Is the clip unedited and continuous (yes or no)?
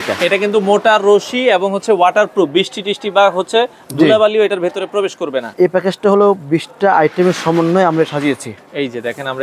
no